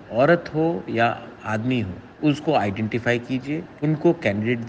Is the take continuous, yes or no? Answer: no